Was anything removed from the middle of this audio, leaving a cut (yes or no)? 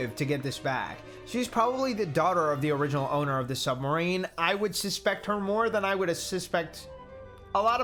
no